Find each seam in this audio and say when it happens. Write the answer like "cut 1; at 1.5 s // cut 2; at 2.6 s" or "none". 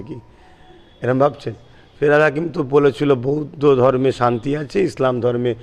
none